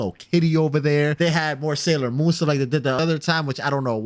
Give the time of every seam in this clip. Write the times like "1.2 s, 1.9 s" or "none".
1.1 s, 3.0 s